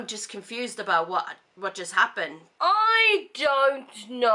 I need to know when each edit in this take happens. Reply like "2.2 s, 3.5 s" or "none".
2.4 s